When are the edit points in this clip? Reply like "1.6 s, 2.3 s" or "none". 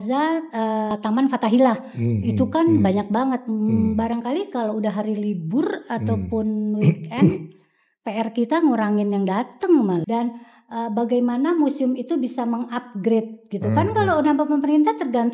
0.9 s, 10.0 s